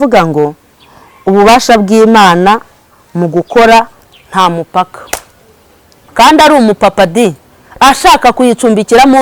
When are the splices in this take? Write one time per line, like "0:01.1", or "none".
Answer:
0:06.0

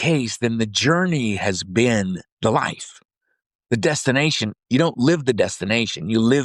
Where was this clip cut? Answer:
0:02.3

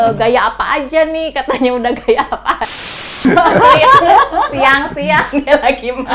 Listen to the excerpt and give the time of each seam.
0:03.2

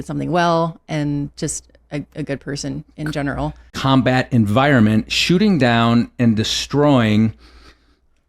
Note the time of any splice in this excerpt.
0:03.8

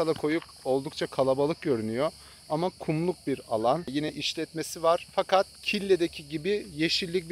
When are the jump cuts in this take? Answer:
0:03.9
0:05.6

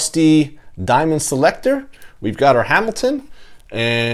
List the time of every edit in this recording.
none

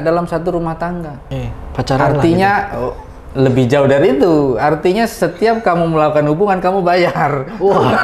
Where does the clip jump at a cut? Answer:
0:01.2

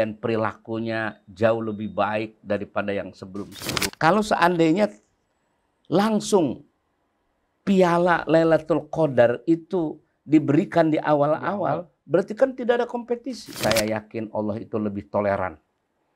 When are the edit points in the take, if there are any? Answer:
0:03.9
0:13.4

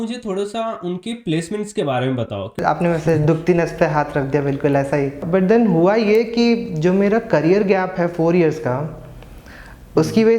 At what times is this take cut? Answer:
0:02.6
0:05.2

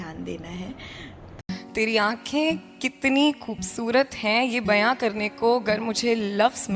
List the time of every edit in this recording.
0:01.3

